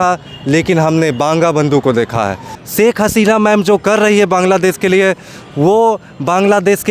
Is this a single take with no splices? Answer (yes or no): no